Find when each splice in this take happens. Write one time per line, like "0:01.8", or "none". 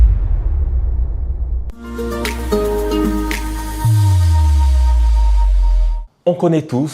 0:01.7